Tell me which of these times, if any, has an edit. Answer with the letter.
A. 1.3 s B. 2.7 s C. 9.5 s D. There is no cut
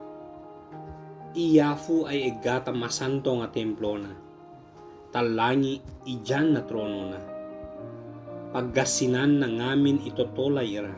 A